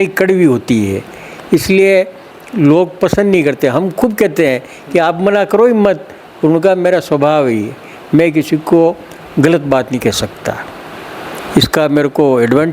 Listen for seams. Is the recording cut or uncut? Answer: cut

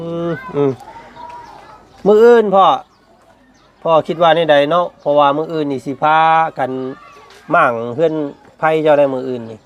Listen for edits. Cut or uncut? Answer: uncut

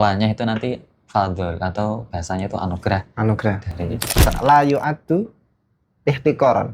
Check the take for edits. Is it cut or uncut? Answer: cut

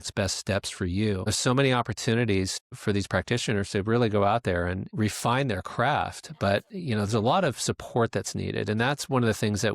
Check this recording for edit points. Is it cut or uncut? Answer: cut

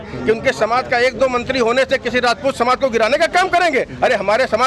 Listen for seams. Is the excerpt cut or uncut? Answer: uncut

